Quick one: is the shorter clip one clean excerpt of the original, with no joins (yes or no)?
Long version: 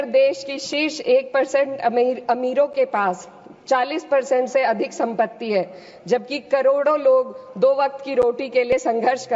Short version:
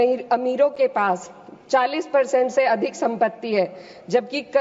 yes